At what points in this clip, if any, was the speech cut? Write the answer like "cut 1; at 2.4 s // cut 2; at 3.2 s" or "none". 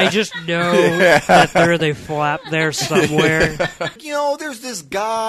cut 1; at 4.0 s